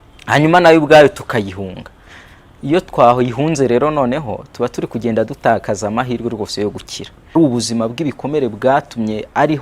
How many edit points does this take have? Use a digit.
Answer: 1